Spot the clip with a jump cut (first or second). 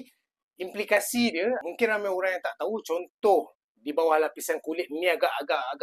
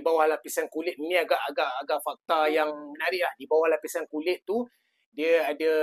first